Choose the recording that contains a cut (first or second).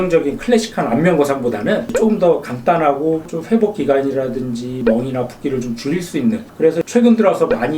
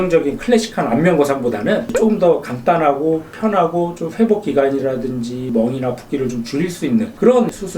first